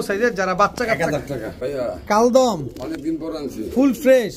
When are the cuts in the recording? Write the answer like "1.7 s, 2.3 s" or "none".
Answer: 1.6 s